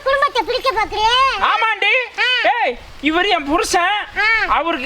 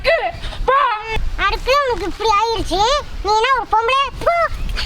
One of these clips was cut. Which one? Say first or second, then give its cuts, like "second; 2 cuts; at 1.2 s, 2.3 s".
second; 1 cut; at 1.1 s